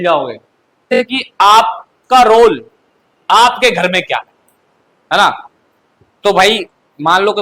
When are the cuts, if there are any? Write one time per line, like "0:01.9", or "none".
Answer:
0:00.9